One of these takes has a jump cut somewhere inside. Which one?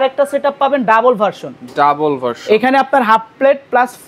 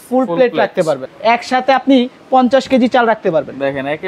second; 1 cut; at 1.0 s

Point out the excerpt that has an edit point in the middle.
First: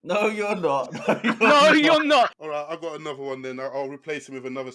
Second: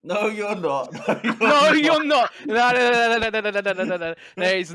first; 1 cut; at 2.4 s

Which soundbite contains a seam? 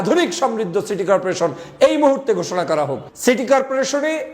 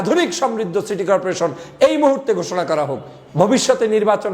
first; 1 cut; at 3.0 s

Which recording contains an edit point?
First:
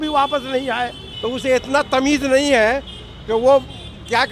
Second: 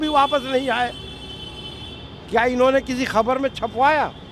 first; 1 cut; at 1.0 s

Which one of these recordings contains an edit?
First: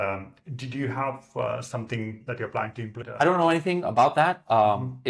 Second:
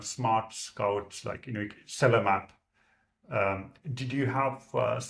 first; 1 cut; at 3.0 s

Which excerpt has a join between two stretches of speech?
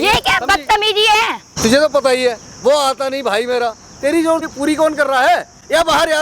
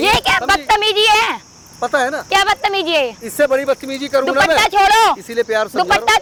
first; 2 cuts; at 1.4 s, 4.5 s

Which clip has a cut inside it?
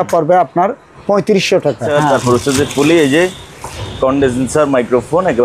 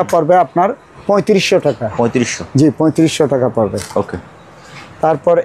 first; 1 cut; at 1.8 s

